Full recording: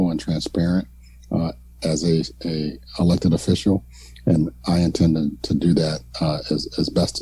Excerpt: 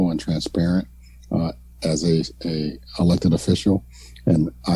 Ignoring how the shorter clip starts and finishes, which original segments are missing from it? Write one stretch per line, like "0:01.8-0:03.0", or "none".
none